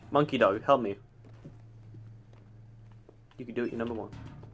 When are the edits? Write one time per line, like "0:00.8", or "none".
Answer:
none